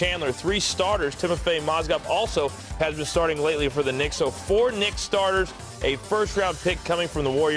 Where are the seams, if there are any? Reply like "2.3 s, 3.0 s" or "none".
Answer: 1.2 s